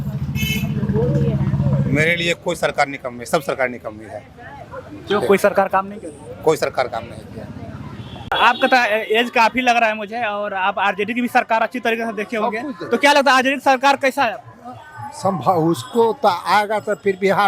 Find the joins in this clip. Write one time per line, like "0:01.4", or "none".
0:08.3